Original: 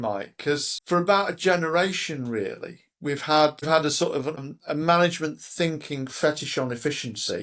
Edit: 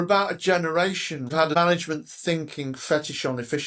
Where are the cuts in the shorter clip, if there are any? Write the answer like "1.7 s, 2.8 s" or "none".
1.4 s